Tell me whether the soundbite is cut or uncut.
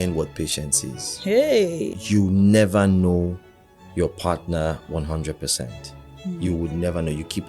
cut